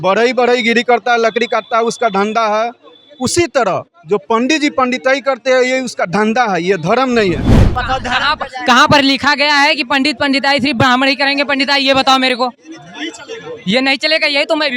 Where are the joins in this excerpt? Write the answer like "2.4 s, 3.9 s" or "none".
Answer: 7.7 s